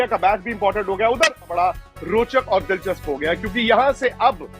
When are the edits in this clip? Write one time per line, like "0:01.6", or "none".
0:01.5

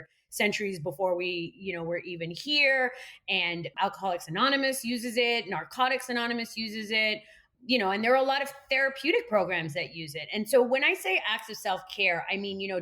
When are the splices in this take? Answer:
0:03.7

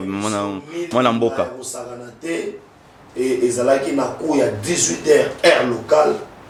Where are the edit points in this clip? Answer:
none

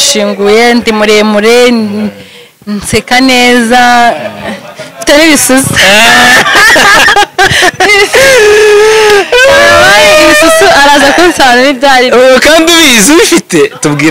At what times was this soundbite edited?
none

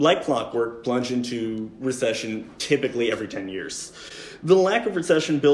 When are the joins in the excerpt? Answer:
none

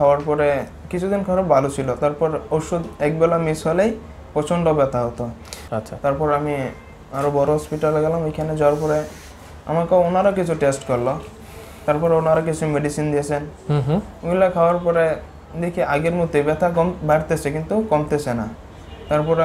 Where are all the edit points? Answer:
0:05.6
0:18.5

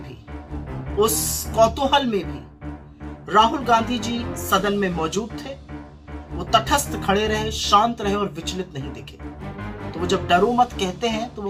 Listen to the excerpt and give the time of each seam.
none

